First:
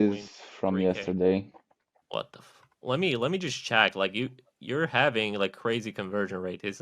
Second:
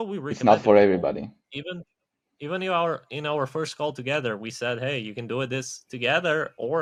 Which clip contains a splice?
first; 1 cut; at 2.0 s

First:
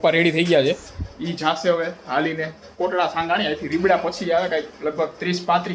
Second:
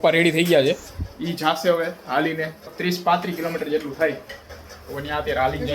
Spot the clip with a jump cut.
second; 1 cut; at 2.7 s

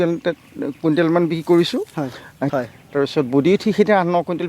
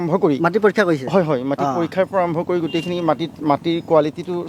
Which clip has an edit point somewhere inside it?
first; 1 cut; at 2.5 s

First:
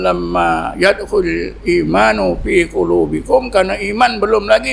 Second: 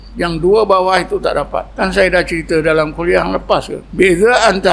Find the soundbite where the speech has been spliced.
second; 2 cuts; at 1.7 s, 3.8 s

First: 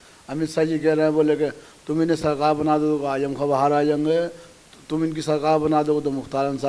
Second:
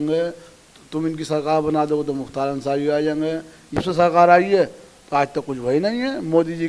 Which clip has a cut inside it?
second; 1 cut; at 3.8 s

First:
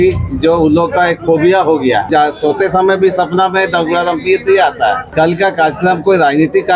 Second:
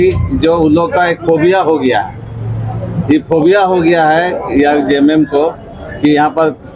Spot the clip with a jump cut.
first; 2 cuts; at 2.1 s, 5.1 s

